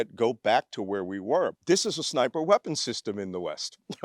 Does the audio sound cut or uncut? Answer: cut